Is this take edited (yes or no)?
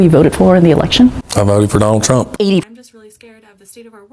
yes